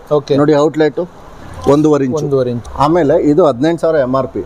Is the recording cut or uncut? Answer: cut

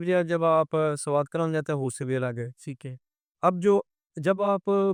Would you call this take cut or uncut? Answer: uncut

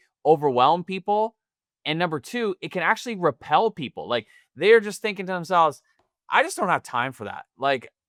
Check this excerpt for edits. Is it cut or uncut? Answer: uncut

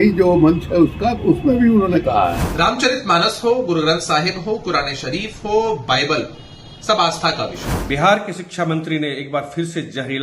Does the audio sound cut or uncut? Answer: cut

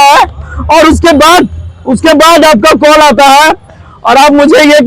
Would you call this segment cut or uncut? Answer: uncut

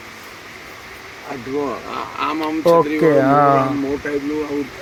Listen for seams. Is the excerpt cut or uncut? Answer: uncut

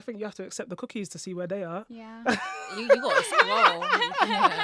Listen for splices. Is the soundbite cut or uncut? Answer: uncut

